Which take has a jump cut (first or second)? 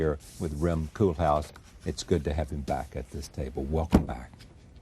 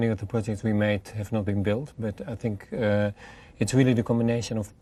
first